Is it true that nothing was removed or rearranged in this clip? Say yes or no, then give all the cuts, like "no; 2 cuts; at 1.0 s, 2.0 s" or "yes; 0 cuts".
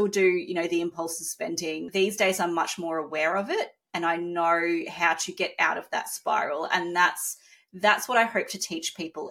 no; 1 cut; at 1.8 s